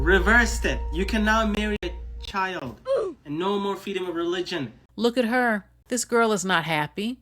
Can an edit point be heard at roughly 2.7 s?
no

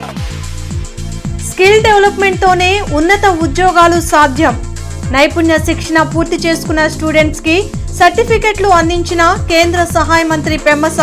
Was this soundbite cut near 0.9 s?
no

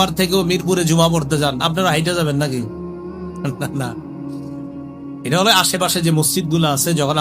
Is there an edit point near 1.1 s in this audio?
no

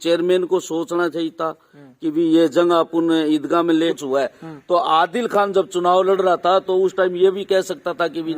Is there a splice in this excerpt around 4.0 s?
yes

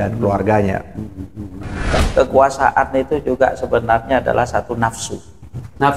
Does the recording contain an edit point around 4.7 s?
no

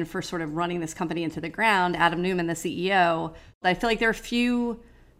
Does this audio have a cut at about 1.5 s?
no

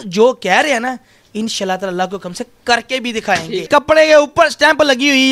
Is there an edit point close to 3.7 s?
yes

